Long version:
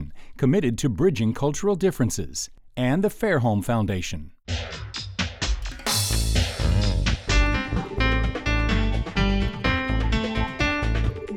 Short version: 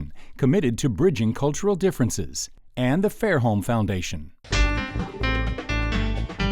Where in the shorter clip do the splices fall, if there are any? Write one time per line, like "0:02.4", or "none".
0:04.4